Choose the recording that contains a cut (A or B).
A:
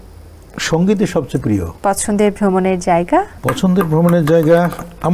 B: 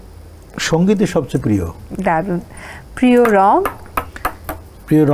A